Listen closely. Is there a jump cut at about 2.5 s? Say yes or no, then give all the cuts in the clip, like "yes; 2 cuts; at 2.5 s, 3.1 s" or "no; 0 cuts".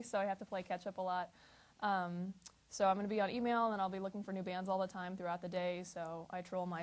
no; 1 cut; at 4.2 s